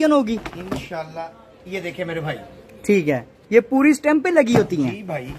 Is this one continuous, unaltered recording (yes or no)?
no